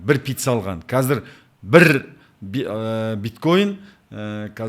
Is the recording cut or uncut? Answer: uncut